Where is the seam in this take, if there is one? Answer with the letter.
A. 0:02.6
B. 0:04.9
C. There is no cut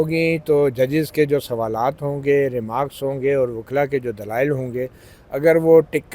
C